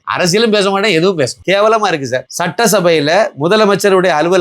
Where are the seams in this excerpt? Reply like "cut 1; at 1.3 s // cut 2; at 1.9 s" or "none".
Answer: cut 1; at 1.4 s

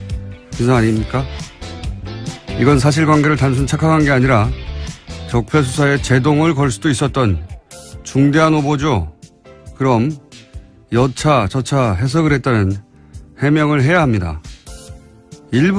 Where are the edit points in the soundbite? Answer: cut 1; at 9.1 s

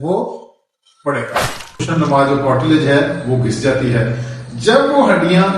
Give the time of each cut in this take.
cut 1; at 1.9 s

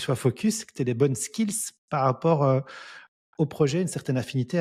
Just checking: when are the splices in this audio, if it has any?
none

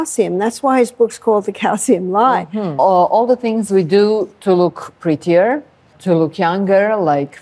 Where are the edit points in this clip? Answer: cut 1; at 2.7 s // cut 2; at 5.9 s

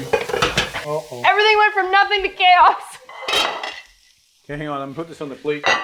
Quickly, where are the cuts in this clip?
none

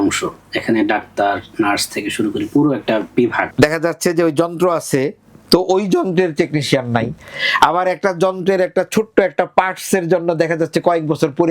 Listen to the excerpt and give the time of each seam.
cut 1; at 3.4 s

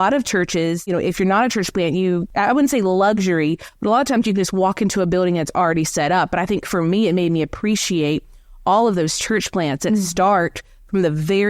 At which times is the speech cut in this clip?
cut 1; at 0.9 s // cut 2; at 2.3 s

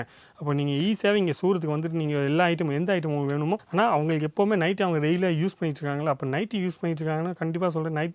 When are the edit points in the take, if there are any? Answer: cut 1; at 3.7 s

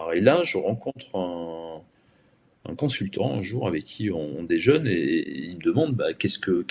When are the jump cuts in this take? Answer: none

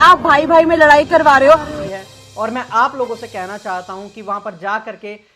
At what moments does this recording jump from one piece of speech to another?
cut 1; at 1.8 s

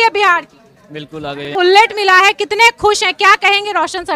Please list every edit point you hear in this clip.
cut 1; at 1.5 s

